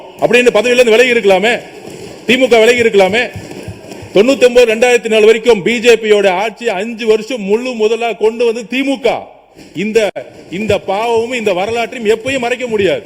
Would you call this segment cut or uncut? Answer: uncut